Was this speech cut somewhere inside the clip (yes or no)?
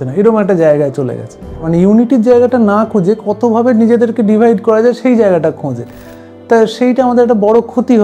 yes